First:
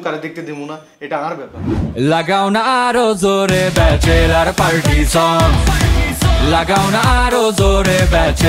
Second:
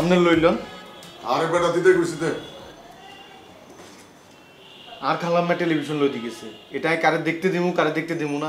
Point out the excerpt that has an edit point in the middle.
first; 1 cut; at 2.0 s

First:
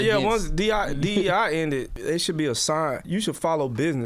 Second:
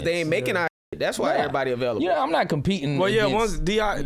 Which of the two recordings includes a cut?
first; 2 cuts; at 1.9 s, 3.0 s

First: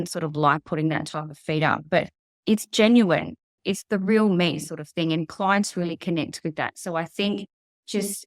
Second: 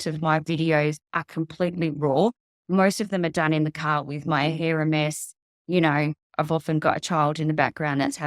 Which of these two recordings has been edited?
first; 2 cuts; at 2.2 s, 3.5 s

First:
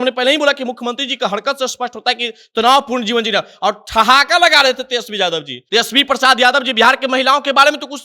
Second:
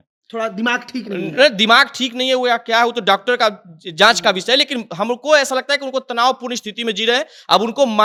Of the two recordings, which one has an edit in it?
first; 1 cut; at 5.5 s

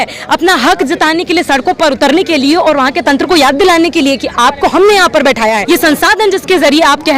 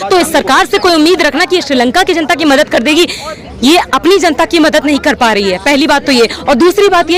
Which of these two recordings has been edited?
first; 1 cut; at 5.6 s

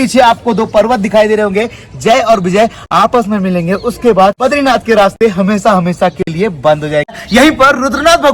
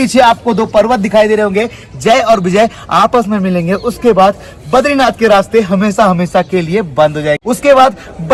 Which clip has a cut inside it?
first; 2 cuts; at 4.4 s, 7.2 s

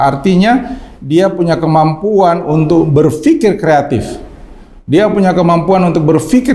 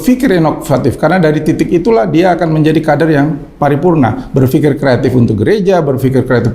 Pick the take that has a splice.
first; 1 cut; at 2.9 s

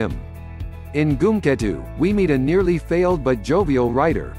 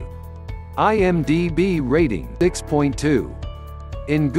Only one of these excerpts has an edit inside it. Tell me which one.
second; 1 cut; at 2.3 s

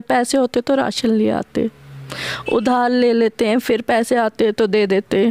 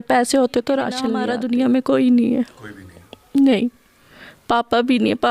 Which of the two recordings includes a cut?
second; 1 cut; at 1.2 s

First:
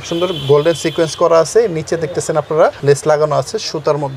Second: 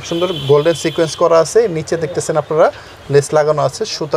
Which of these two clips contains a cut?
first; 1 cut; at 2.8 s

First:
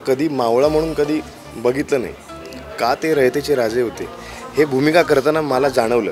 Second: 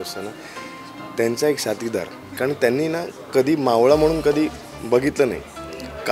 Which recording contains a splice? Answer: second; 1 cut; at 2.3 s

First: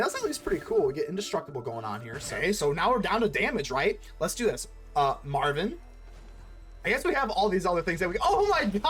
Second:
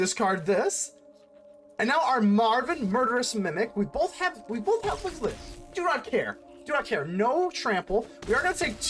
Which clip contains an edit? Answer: first; 1 cut; at 2.2 s

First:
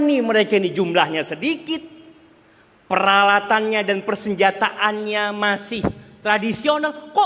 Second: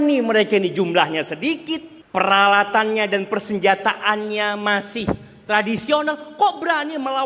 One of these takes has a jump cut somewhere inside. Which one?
second; 1 cut; at 1.9 s

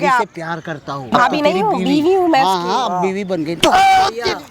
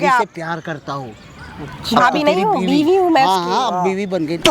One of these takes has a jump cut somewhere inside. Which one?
first; 1 cut; at 1.1 s

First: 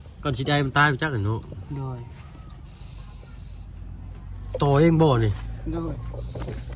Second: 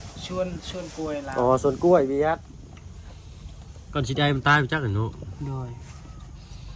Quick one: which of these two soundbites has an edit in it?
second; 1 cut; at 2.5 s

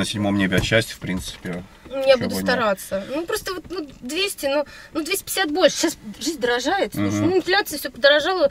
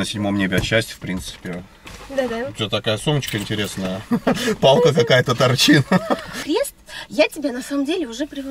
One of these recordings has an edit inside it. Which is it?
second; 2 cuts; at 1.8 s, 6.3 s

